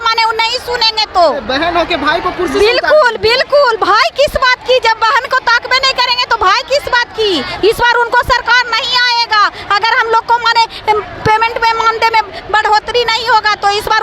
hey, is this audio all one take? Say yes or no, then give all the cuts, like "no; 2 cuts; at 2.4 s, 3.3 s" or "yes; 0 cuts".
yes; 0 cuts